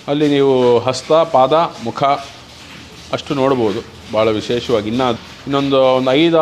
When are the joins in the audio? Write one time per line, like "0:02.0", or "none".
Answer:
0:05.1